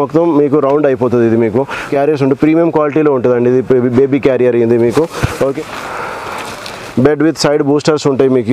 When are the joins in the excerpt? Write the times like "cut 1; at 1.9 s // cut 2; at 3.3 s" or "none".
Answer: cut 1; at 1.9 s // cut 2; at 5.7 s